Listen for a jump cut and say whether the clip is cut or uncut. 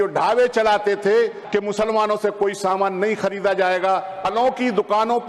cut